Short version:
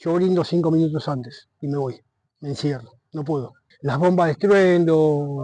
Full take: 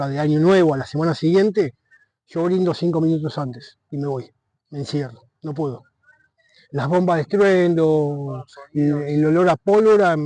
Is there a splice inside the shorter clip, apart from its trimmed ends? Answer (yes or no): yes